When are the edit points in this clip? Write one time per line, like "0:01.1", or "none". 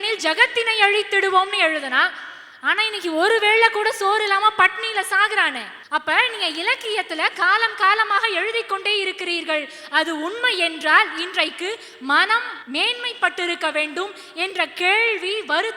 0:05.7
0:12.6